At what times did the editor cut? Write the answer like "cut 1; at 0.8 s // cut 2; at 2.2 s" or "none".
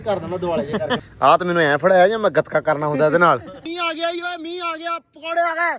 cut 1; at 1.0 s // cut 2; at 3.6 s